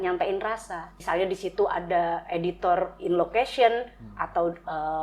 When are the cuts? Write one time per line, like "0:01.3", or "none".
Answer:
0:01.0